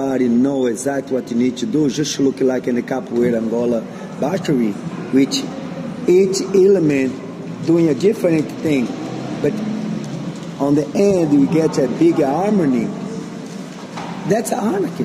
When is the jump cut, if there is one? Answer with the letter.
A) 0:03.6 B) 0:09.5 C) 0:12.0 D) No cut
D